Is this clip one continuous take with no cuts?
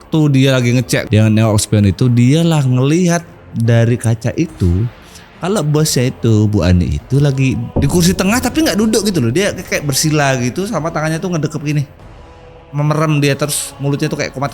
no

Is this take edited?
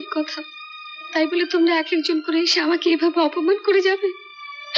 no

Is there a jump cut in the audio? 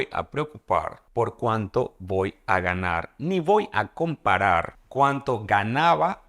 yes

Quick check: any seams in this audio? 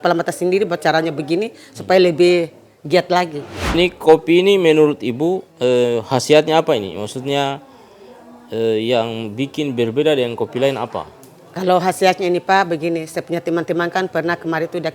yes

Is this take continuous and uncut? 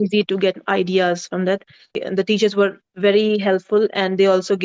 no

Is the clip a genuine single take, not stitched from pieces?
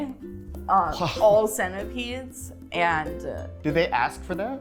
yes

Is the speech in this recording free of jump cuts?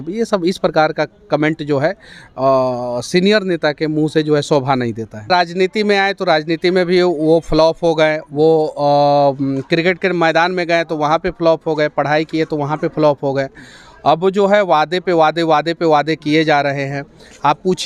no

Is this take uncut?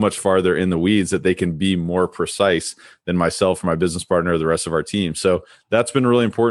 yes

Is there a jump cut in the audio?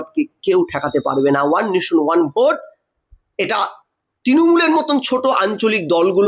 no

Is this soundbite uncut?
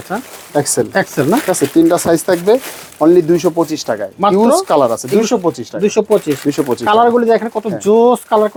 yes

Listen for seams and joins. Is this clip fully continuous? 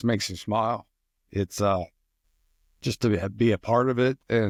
yes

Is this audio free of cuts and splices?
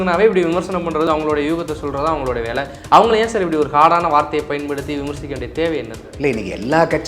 no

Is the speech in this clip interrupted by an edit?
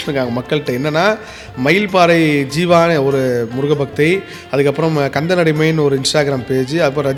no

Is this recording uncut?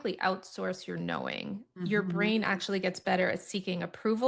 yes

